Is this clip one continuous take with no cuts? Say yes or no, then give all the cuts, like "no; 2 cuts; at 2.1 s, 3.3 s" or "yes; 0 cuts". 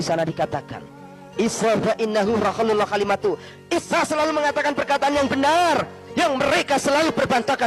yes; 0 cuts